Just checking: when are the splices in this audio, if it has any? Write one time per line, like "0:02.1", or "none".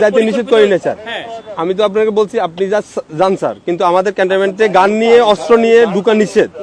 none